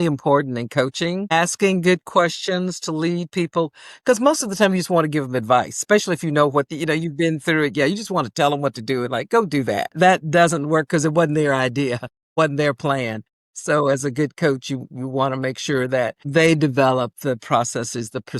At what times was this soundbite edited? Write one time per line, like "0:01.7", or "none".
0:06.7
0:09.9